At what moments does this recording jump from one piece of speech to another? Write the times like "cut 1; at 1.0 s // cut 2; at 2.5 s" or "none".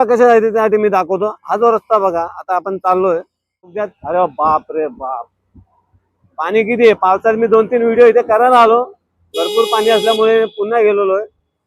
cut 1; at 3.6 s